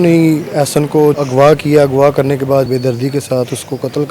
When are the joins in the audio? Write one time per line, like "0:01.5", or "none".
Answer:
0:01.2
0:02.7